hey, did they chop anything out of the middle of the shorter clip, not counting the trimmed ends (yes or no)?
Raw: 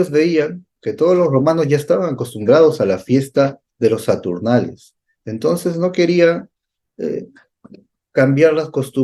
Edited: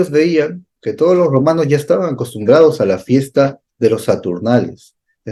no